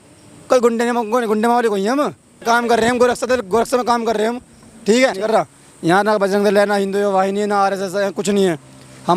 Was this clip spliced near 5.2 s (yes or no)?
yes